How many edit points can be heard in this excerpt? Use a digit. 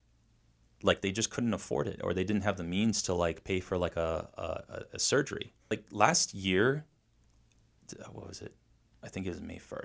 1